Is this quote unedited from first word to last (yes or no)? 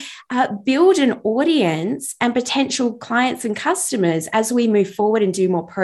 yes